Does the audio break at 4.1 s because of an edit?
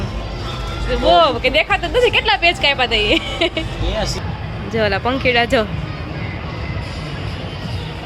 yes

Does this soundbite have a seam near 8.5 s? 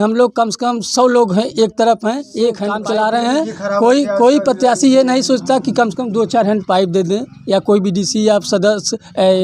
no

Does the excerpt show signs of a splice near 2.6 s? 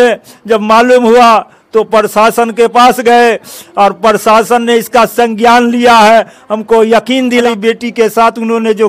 no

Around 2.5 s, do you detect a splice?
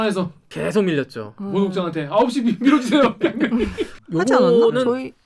no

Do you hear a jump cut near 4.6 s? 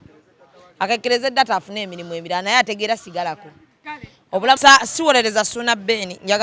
yes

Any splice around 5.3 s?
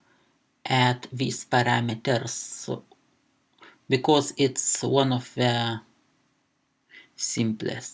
no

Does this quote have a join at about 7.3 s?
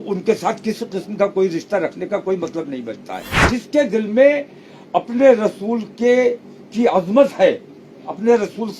no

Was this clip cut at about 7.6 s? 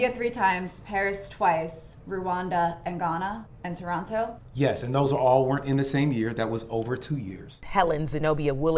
yes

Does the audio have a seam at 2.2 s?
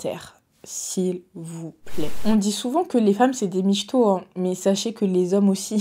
yes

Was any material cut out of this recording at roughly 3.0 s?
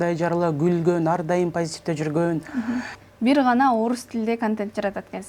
yes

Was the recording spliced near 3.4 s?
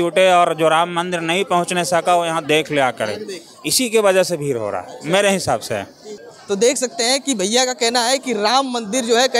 no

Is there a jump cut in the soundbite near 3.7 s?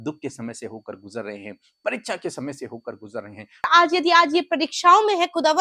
yes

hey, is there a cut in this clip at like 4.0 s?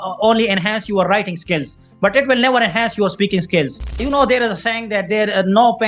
yes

